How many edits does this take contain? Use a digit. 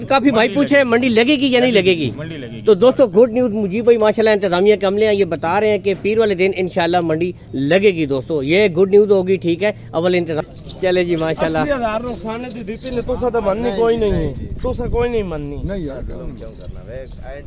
1